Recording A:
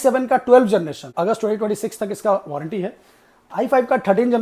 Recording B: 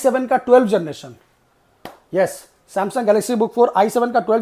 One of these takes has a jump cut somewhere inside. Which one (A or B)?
A